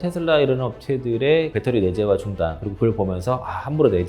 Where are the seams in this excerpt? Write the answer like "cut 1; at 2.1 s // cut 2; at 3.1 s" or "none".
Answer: cut 1; at 1.5 s